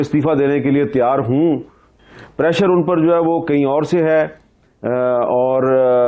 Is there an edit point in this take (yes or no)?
yes